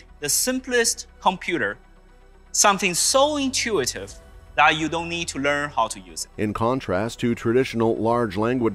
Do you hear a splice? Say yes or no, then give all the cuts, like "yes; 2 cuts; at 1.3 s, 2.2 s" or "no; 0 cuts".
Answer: no; 0 cuts